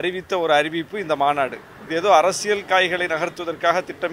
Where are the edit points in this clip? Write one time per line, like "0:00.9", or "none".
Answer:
none